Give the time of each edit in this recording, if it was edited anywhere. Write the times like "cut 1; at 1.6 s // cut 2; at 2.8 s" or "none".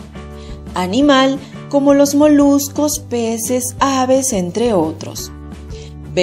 cut 1; at 3.7 s